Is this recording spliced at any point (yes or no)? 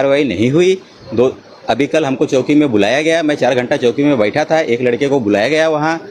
no